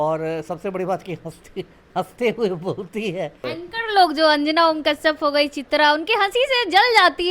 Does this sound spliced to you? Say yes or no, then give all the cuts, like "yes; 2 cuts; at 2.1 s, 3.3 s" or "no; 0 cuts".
yes; 1 cut; at 3.4 s